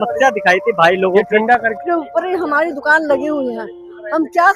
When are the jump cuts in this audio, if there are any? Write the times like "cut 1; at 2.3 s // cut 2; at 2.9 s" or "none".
cut 1; at 1.8 s